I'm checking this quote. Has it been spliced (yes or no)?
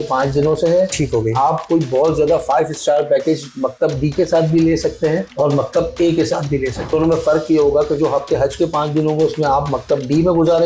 yes